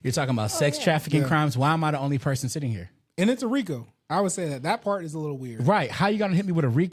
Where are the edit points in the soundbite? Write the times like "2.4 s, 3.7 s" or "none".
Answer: none